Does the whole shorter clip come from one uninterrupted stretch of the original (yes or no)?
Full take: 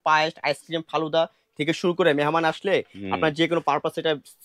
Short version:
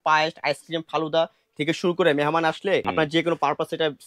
no